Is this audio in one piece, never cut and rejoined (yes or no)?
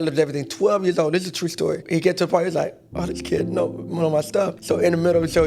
no